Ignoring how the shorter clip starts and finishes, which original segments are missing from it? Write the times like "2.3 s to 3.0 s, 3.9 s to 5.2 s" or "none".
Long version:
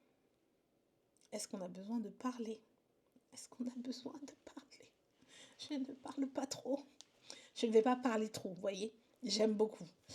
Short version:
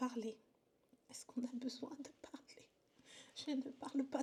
none